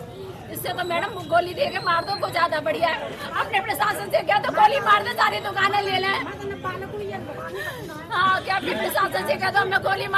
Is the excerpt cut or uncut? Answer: uncut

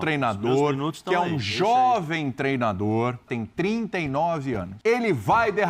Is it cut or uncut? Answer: cut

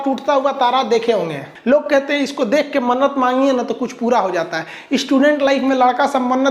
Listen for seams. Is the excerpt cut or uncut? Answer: uncut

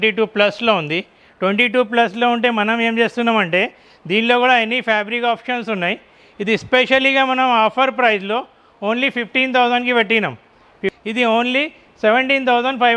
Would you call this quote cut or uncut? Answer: cut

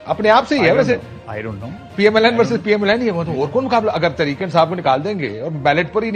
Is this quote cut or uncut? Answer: uncut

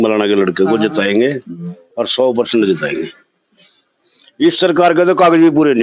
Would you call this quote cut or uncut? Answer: uncut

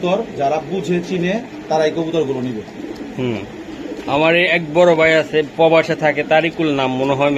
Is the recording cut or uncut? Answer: uncut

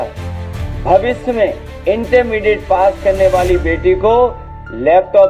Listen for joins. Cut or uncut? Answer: cut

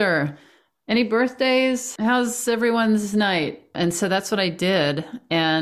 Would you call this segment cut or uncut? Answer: cut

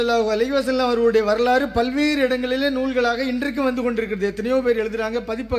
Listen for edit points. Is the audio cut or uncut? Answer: uncut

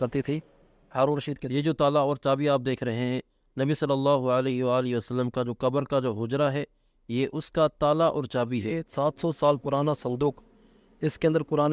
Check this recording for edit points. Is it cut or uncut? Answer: cut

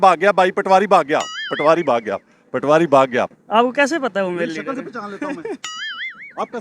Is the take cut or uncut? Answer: cut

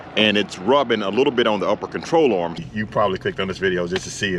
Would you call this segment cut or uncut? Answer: cut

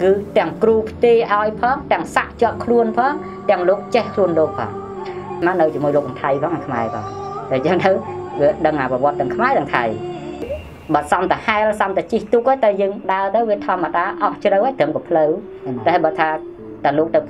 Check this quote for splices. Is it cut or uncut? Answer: cut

